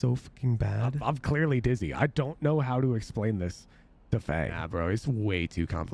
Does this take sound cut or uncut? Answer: cut